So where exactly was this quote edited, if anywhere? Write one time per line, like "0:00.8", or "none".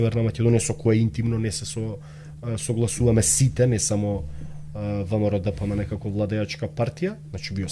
none